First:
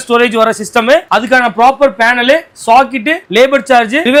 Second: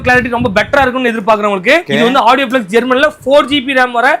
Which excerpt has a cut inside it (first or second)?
second